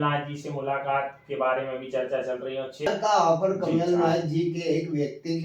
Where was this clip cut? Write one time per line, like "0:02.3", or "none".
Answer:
0:02.9